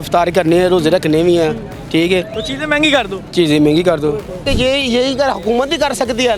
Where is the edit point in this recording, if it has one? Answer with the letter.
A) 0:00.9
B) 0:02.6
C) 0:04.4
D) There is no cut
C